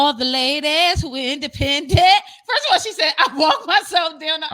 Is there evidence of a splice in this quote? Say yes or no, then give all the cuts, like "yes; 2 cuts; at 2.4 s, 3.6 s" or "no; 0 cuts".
no; 0 cuts